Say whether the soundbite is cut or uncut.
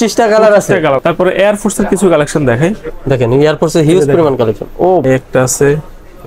cut